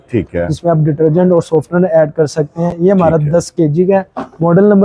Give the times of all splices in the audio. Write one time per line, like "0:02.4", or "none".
none